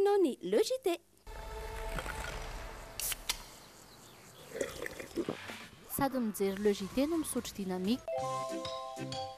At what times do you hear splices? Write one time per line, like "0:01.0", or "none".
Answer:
0:01.2
0:08.0

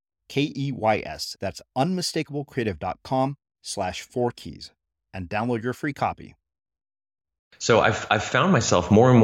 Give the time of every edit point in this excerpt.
0:07.6

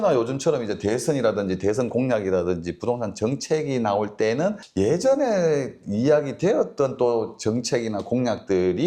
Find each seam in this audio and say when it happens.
none

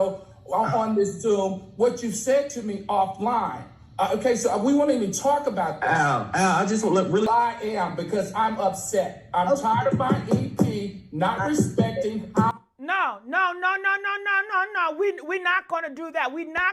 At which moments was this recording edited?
0:07.3

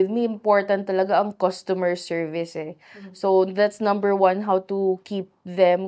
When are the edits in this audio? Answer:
none

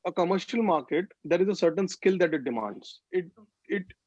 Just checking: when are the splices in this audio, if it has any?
0:02.9

